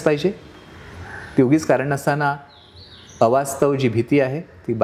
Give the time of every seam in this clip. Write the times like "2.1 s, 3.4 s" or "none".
none